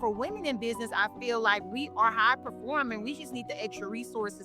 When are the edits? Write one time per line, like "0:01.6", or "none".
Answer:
none